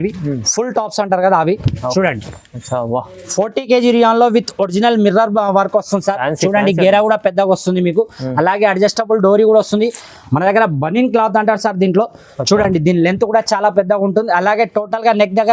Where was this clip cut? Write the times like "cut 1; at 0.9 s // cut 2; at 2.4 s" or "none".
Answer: cut 1; at 10.1 s